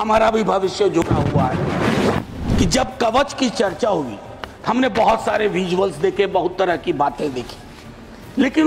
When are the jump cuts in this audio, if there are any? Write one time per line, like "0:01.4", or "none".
0:02.4